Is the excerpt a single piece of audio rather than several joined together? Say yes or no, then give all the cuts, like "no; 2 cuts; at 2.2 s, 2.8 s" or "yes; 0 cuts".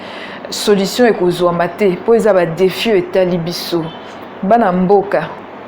yes; 0 cuts